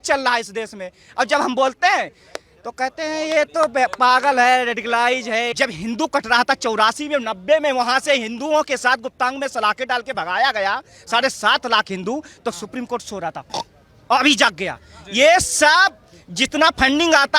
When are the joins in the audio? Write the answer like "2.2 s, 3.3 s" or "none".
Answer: 5.5 s